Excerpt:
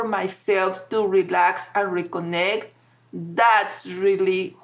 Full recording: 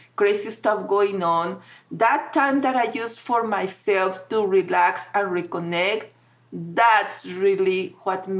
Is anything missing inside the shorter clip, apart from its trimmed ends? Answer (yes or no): no